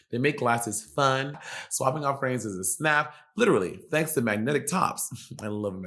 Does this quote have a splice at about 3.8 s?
no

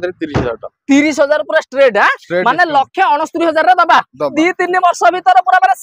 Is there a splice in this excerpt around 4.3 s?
yes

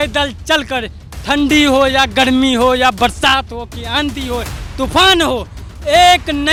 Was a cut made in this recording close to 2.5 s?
no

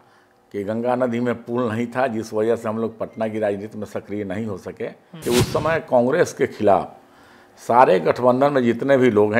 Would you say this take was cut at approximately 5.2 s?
yes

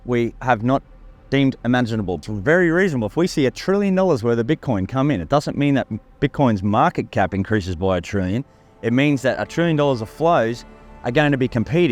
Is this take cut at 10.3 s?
no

